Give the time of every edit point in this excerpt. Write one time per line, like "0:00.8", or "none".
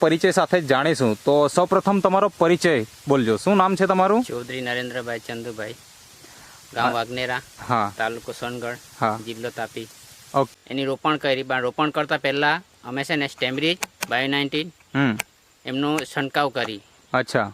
0:10.5